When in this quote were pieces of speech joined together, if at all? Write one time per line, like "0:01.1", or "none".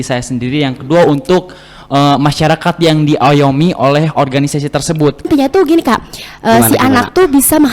0:05.3

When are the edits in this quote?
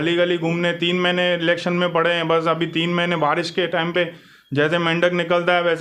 none

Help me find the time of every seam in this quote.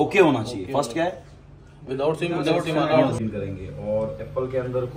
0:03.1

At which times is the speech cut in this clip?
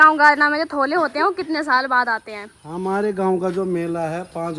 none

